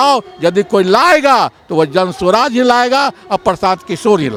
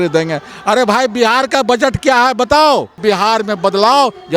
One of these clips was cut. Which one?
second; 1 cut; at 3.0 s

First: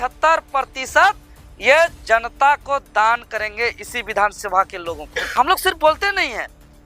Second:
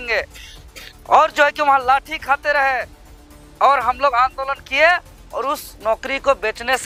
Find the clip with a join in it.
first; 1 cut; at 5.3 s

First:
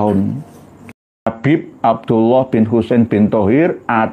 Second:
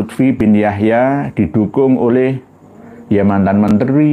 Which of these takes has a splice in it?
first; 1 cut; at 1.2 s

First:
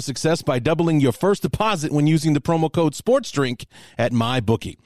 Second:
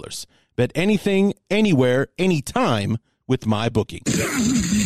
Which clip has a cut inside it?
second; 1 cut; at 4.0 s

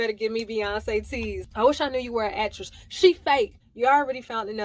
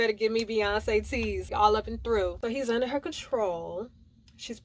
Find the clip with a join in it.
first; 2 cuts; at 1.4 s, 3.6 s

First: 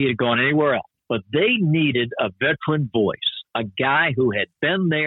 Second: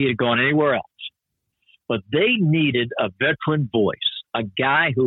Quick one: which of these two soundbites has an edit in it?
first; 1 cut; at 0.9 s

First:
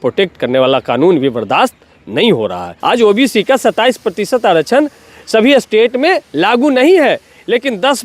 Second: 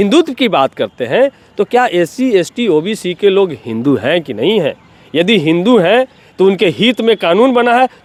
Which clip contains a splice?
first; 1 cut; at 2.7 s

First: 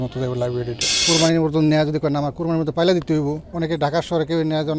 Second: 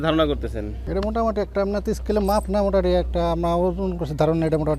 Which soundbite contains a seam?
first; 2 cuts; at 1.0 s, 3.5 s

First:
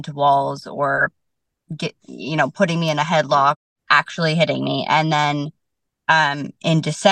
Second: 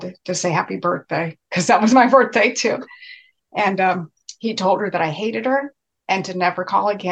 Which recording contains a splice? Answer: first; 1 cut; at 3.6 s

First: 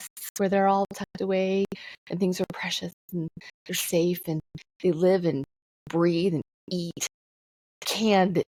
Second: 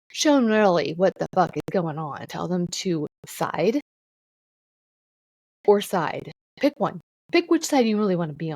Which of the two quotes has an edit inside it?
second; 4 cuts; at 2.2 s, 3.2 s, 6.4 s, 7.1 s

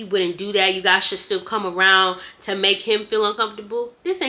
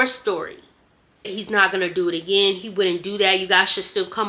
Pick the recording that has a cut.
second; 1 cut; at 1.3 s

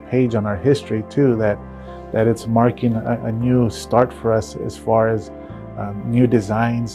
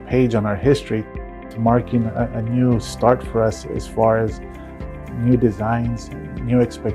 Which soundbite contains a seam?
second; 1 cut; at 1.1 s

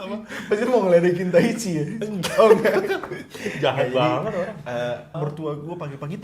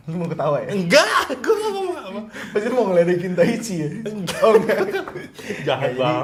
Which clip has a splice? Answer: first; 1 cut; at 5.2 s

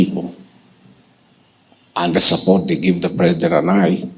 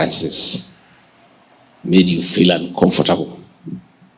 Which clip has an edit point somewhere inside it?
first; 1 cut; at 2.9 s

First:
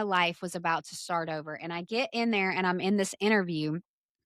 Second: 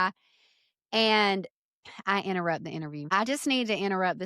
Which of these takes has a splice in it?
second; 1 cut; at 3.1 s

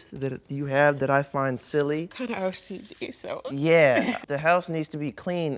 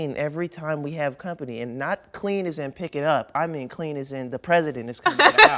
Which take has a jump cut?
first; 1 cut; at 4.2 s

